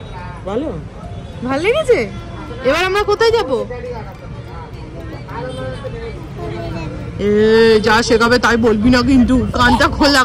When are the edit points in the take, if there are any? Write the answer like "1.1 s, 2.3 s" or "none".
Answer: none